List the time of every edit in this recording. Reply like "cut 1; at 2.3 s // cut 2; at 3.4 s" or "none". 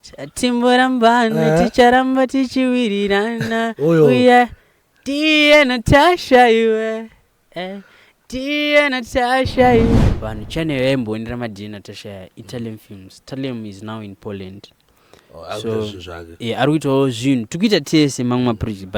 cut 1; at 10.0 s